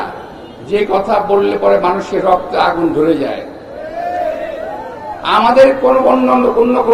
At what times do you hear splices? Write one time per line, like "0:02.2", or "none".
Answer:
none